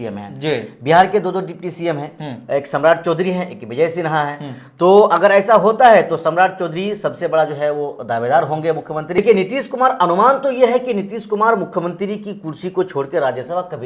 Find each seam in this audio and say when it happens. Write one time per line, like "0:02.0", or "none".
0:09.2